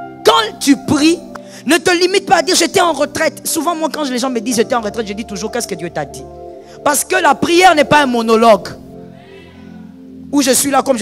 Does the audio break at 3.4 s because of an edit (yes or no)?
no